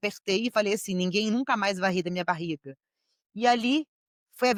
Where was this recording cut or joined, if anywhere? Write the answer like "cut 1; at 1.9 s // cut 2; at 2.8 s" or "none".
none